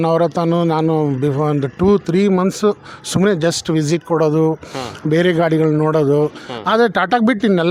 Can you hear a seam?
no; 0 cuts

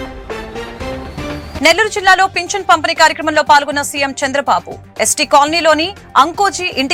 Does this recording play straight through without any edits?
yes; 0 cuts

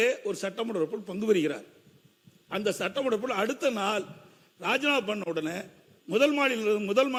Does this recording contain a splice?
no; 0 cuts

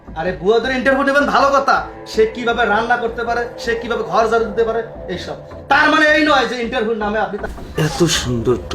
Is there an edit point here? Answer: yes; 1 cut; at 7.5 s

